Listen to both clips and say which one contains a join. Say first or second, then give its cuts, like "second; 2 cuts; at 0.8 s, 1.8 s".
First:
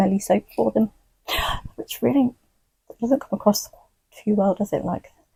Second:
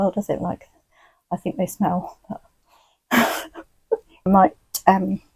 second; 1 cut; at 4.2 s